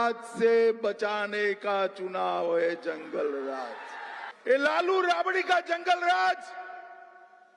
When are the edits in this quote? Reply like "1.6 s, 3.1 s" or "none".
4.2 s

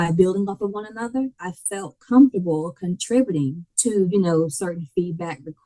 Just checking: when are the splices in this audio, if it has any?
1.4 s, 3.7 s

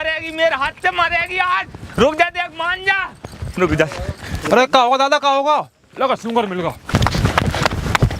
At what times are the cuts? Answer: 4.3 s, 6.8 s

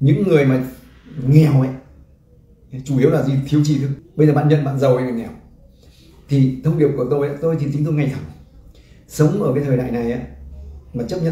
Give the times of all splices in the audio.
4.0 s

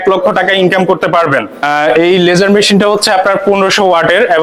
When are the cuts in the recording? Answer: 1.5 s

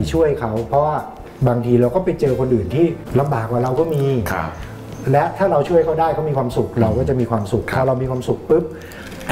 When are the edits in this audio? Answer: none

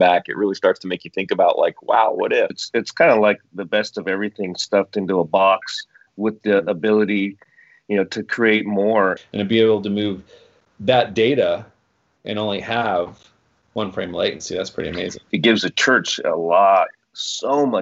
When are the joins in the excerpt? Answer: 2.6 s, 9.2 s, 15.3 s

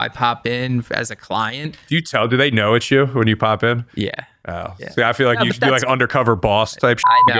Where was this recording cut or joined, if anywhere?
2.1 s

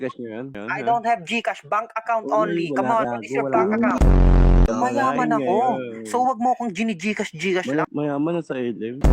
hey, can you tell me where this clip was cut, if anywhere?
7.8 s

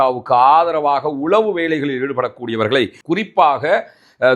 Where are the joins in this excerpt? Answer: 3.0 s

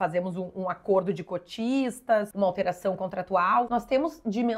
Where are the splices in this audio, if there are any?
2.3 s, 3.7 s

